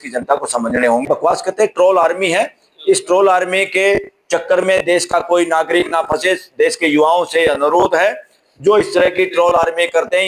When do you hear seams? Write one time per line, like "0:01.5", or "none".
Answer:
0:01.0